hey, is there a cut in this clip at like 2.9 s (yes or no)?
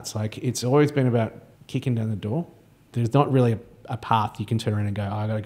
yes